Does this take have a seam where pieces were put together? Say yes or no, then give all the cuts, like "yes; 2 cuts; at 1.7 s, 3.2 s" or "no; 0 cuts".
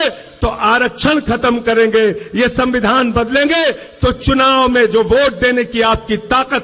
no; 0 cuts